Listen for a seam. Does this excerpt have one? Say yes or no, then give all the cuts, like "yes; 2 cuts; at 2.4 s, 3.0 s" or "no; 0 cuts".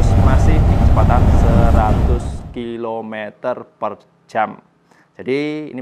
no; 0 cuts